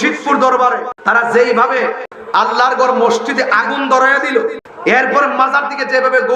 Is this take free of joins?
no; 3 cuts; at 0.9 s, 2.1 s, 4.7 s

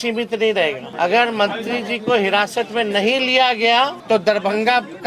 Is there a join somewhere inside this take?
yes; 2 cuts; at 0.9 s, 4.0 s

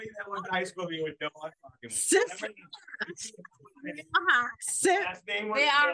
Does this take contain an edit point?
no; 0 cuts

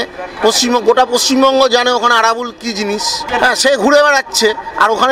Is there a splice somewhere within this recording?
yes; 1 cut; at 3.3 s

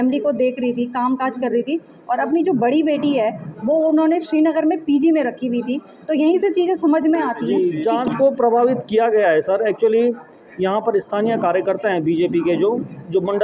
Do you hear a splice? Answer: yes; 1 cut; at 7.4 s

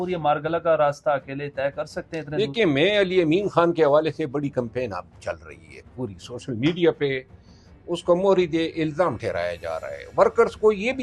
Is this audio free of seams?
yes; 0 cuts

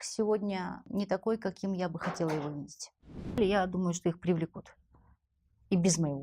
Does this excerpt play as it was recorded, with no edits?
no; 2 cuts; at 0.8 s, 3.4 s

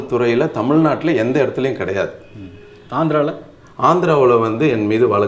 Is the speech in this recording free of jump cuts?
yes; 0 cuts

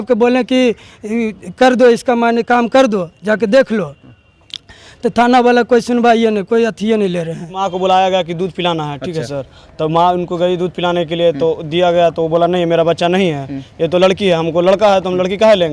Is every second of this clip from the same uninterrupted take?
no; 1 cut; at 7.6 s

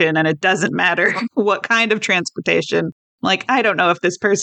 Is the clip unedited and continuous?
no; 1 cut; at 1.3 s

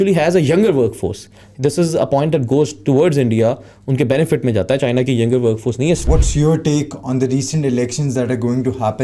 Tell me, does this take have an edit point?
yes; 1 cut; at 6.0 s

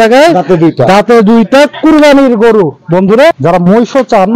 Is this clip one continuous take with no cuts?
no; 1 cut; at 3.4 s

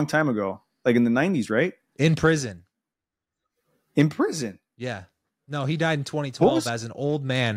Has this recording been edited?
no; 0 cuts

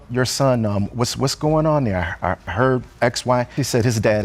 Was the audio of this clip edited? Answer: no; 0 cuts

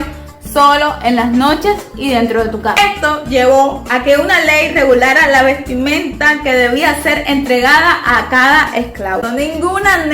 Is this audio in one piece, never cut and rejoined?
no; 2 cuts; at 2.8 s, 9.2 s

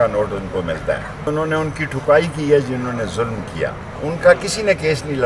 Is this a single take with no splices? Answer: no; 2 cuts; at 1.3 s, 3.9 s

